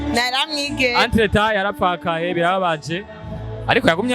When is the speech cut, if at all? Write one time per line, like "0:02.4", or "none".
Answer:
none